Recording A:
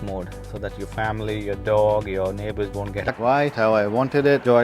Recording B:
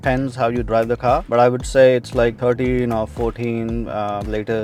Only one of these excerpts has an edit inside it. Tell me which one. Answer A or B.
A